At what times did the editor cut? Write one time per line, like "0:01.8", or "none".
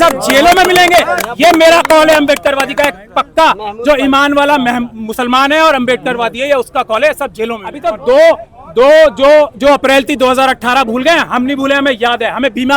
0:07.7